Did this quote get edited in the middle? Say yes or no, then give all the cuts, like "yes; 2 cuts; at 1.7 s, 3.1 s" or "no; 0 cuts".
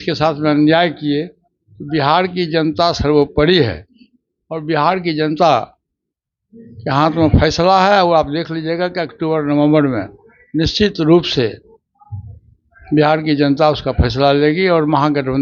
no; 0 cuts